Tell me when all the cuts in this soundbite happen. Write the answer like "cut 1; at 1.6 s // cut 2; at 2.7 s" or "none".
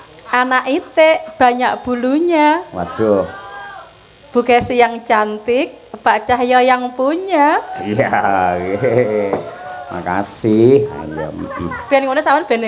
none